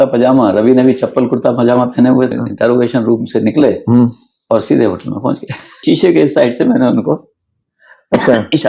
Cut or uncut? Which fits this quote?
cut